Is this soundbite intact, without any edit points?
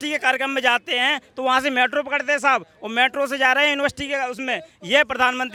yes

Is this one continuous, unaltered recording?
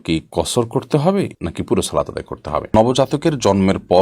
no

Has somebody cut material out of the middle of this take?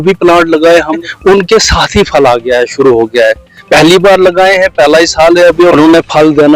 yes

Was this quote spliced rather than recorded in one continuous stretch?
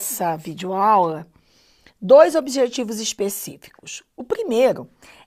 no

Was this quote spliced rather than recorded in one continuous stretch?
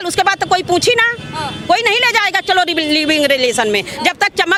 no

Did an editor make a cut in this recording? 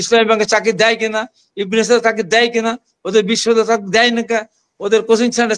no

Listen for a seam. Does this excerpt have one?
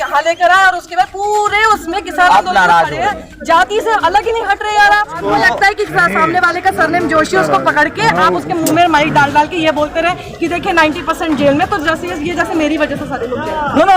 yes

